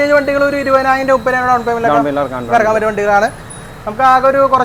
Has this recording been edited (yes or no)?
no